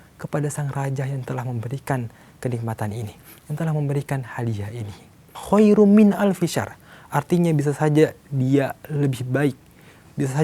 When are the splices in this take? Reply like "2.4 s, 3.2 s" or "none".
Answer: 5.3 s